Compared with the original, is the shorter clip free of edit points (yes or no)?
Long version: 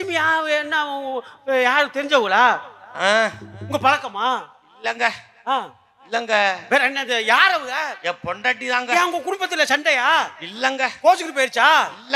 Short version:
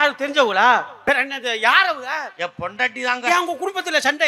no